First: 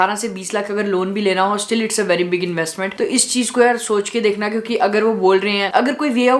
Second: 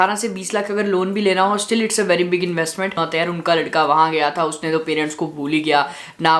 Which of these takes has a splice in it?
second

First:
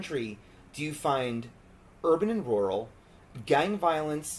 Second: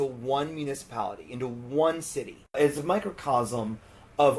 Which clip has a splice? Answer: second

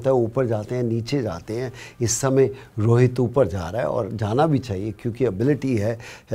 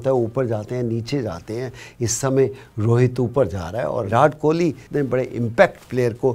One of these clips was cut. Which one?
second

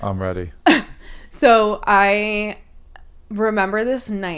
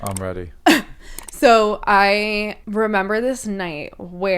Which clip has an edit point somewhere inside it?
second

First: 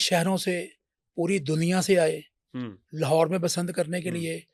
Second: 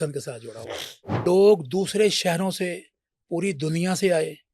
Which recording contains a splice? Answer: second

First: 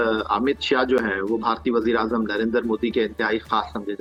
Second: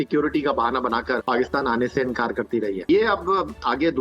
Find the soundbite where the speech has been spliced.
second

